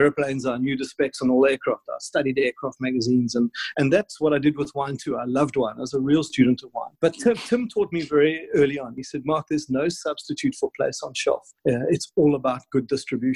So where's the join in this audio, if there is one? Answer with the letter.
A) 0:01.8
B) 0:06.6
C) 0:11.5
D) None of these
C